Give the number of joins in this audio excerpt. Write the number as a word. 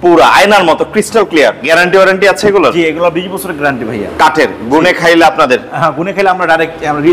one